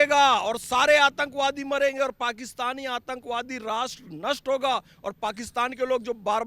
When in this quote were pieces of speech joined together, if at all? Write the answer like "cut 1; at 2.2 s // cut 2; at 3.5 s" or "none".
none